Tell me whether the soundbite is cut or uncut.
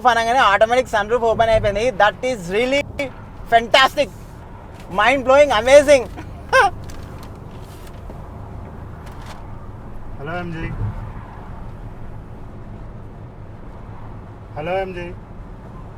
uncut